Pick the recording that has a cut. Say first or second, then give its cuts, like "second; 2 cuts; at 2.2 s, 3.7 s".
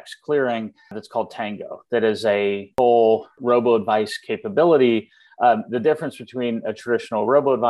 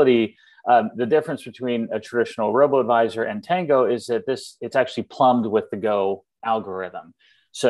first; 3 cuts; at 1.0 s, 2.7 s, 3.3 s